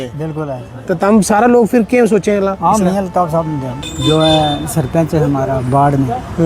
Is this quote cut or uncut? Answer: cut